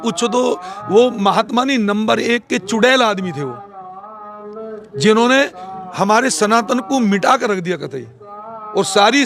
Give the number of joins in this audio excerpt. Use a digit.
0